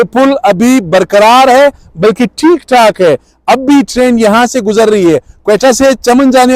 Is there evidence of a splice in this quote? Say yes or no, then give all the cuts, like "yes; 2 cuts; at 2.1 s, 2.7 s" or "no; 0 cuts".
no; 0 cuts